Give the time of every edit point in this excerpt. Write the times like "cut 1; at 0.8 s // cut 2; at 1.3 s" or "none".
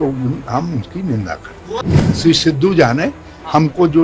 cut 1; at 1.9 s